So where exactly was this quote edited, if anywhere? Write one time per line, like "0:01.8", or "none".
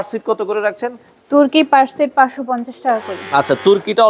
none